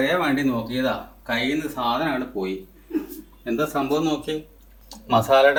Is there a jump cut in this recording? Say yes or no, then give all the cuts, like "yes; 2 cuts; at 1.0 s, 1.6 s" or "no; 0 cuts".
no; 0 cuts